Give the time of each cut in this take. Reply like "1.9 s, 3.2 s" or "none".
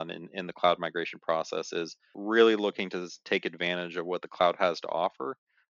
2.2 s